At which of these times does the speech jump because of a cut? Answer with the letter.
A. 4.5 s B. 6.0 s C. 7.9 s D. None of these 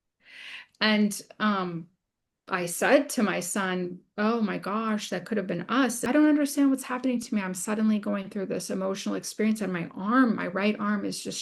B